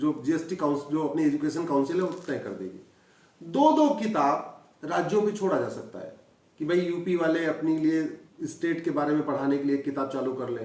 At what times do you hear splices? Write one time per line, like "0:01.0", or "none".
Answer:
0:08.2